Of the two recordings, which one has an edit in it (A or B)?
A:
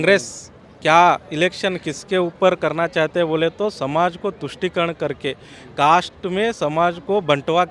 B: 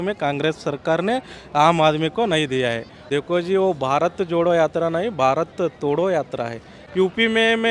B